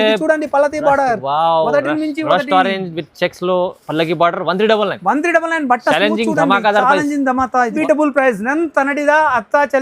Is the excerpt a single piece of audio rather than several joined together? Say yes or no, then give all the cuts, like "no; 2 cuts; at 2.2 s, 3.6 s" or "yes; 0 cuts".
no; 1 cut; at 7.8 s